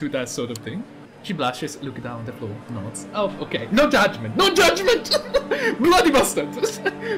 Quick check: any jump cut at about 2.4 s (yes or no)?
no